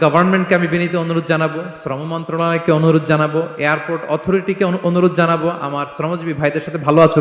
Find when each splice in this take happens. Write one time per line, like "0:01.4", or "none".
none